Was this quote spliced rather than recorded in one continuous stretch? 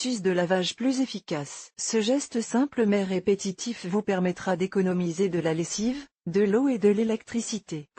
no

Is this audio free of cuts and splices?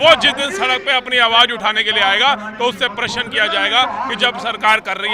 yes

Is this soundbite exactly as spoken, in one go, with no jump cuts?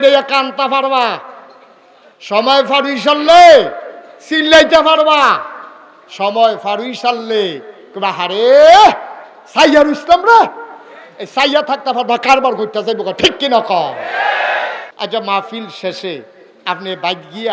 no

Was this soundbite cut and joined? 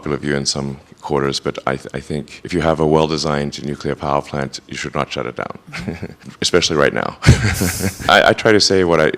yes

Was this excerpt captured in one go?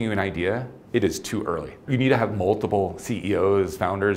no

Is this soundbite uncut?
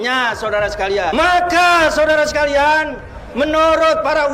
no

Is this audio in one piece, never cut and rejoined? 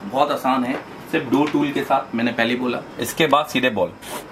no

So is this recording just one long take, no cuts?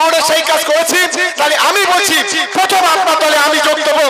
yes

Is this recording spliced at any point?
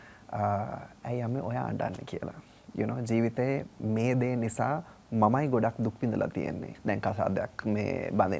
yes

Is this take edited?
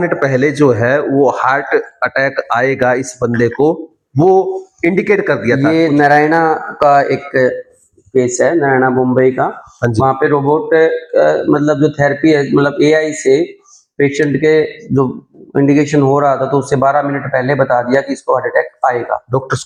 no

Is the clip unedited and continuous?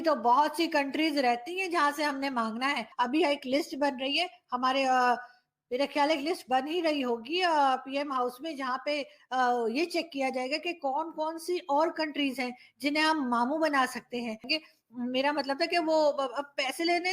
no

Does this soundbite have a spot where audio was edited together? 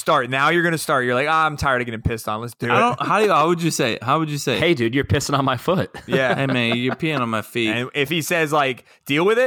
yes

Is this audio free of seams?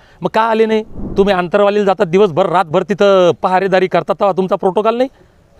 no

